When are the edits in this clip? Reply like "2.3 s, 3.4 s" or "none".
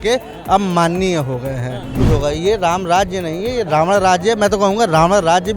2.0 s